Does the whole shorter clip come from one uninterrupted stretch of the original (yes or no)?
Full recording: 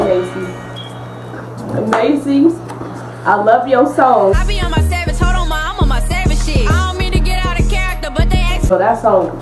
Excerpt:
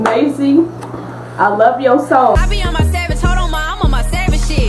no